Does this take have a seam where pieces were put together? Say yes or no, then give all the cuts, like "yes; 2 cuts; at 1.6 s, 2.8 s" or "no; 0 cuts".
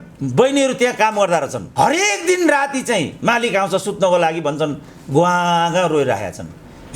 no; 0 cuts